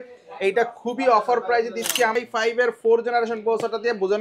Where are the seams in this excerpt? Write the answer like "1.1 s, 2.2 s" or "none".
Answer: 2.2 s

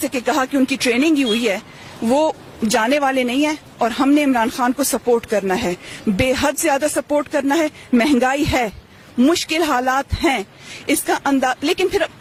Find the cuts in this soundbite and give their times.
none

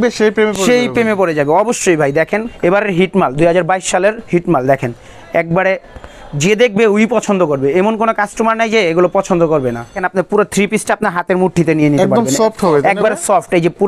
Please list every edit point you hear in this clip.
2.5 s, 10.0 s

